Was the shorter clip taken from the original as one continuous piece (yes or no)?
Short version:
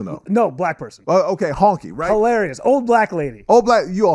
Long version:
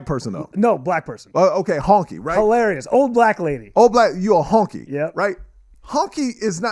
yes